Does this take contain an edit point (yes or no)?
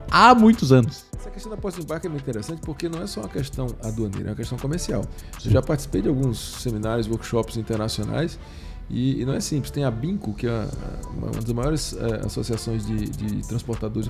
yes